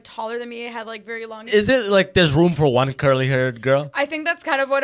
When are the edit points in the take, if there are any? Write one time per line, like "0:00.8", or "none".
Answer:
0:01.5